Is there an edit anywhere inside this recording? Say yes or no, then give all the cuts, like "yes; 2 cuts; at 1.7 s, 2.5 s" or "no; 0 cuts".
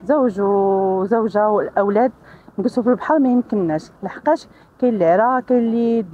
no; 0 cuts